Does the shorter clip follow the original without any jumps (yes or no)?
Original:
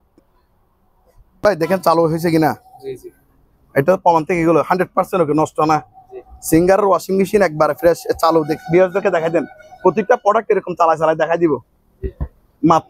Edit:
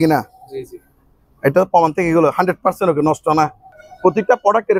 no